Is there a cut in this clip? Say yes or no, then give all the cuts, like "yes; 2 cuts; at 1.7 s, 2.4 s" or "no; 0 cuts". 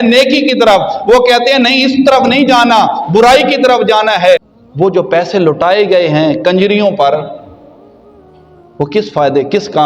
yes; 1 cut; at 4.5 s